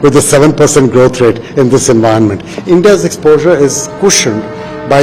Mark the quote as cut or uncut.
cut